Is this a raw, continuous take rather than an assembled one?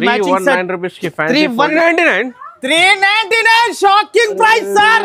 no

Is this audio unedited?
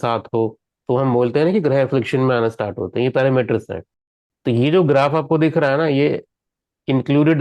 yes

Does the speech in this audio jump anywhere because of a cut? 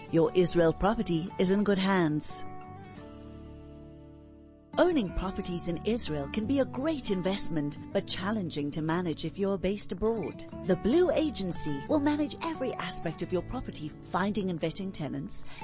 yes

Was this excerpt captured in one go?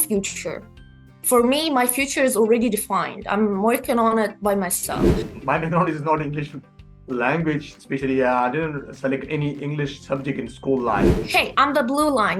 no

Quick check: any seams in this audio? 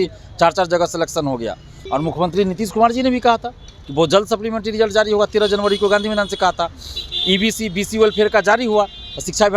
yes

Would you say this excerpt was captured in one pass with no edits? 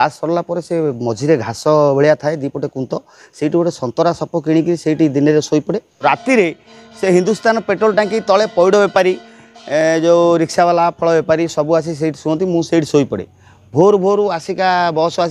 no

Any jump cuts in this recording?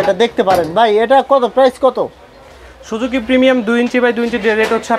no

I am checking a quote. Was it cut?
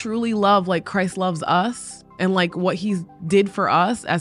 no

